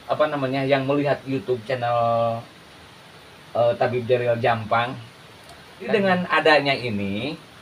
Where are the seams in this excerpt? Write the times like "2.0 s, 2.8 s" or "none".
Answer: 5.8 s

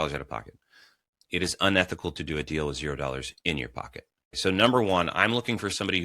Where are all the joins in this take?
4.4 s

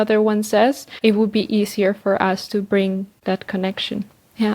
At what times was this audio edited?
1.0 s, 3.1 s

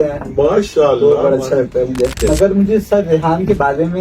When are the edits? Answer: 2.2 s

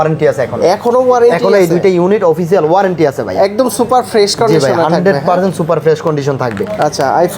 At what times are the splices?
none

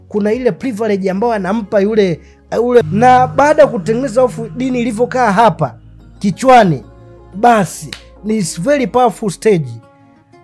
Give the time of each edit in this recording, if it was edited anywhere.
2.8 s

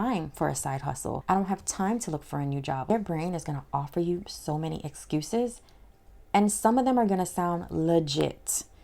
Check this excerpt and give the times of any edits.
1.2 s, 2.9 s

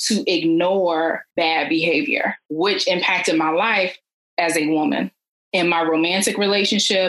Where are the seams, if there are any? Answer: 1.2 s, 2.4 s

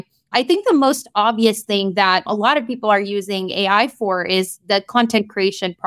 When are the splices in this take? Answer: 2.3 s

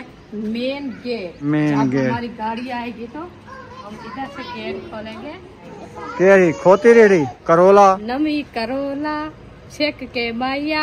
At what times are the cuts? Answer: 1.4 s, 3.8 s, 5.7 s, 7.3 s

